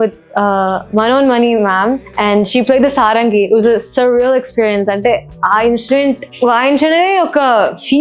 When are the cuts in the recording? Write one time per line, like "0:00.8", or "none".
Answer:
none